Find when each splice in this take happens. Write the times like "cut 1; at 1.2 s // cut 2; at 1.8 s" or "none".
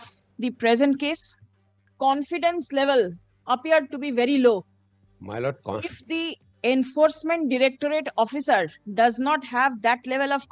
cut 1; at 1.9 s